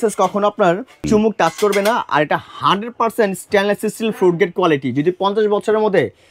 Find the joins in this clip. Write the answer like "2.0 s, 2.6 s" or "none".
0.9 s